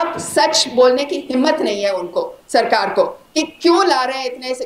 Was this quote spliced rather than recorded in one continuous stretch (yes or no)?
no